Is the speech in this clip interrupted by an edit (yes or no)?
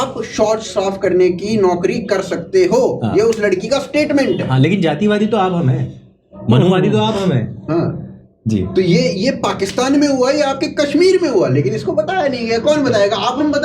no